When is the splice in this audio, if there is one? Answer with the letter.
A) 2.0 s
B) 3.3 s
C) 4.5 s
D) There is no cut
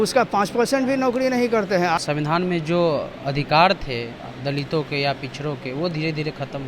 A